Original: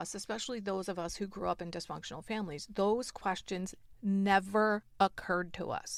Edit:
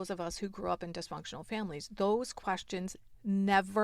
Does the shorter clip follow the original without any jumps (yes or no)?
yes